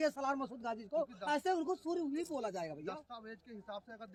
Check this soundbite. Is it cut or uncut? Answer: uncut